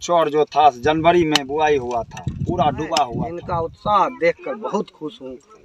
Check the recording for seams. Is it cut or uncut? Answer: cut